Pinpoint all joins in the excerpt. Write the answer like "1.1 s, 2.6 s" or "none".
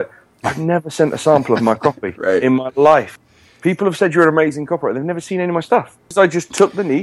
3.1 s, 6.0 s

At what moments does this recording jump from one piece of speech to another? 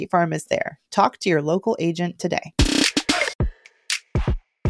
3.4 s

